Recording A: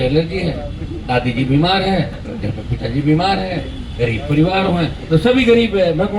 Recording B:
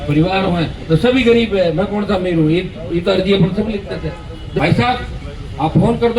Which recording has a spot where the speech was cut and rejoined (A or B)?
B